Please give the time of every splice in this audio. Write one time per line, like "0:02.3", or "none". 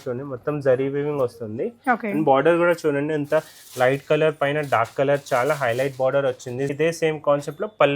0:06.7